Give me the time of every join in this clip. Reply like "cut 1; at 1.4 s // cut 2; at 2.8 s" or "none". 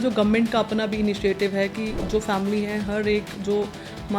cut 1; at 2.0 s